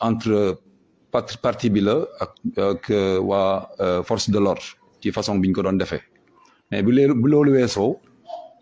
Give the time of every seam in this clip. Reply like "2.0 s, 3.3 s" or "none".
none